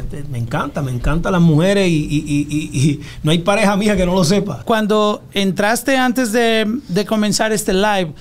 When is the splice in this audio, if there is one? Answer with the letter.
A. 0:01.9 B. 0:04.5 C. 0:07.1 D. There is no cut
B